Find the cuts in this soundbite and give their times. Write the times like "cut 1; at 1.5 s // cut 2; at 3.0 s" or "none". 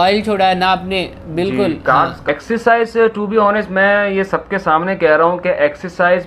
cut 1; at 2.3 s